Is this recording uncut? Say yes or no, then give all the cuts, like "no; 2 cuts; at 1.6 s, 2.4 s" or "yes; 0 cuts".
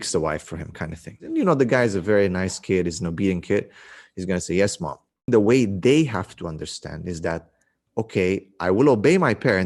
no; 2 cuts; at 1.2 s, 5.3 s